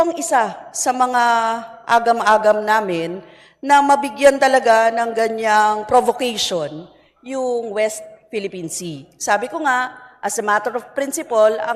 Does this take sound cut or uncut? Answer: uncut